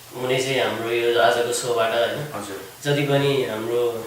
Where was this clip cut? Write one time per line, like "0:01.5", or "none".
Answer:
none